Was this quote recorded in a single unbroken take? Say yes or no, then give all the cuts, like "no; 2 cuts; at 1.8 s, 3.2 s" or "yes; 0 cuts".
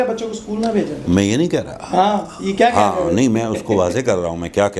yes; 0 cuts